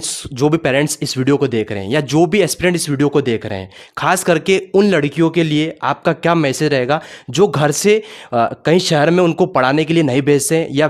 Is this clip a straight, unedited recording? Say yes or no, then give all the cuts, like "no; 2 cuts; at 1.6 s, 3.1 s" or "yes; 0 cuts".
yes; 0 cuts